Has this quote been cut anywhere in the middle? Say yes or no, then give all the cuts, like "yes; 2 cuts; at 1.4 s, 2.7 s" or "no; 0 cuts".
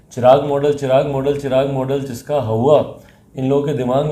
no; 0 cuts